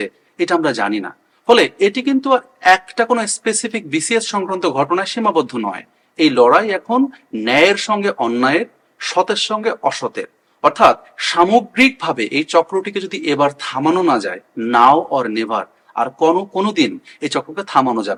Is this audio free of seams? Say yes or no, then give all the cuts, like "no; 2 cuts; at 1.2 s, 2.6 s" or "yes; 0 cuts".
yes; 0 cuts